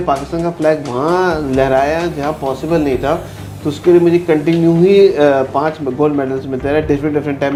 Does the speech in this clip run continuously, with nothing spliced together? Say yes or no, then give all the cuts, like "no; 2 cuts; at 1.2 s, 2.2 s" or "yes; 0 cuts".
yes; 0 cuts